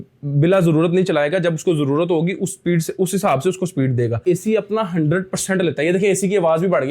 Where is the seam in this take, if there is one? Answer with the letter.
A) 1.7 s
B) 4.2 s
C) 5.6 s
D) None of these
B